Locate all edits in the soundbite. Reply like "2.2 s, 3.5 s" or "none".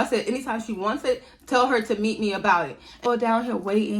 3.1 s